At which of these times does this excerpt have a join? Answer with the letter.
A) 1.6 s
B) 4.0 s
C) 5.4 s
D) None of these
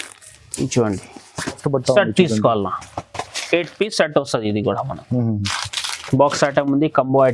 A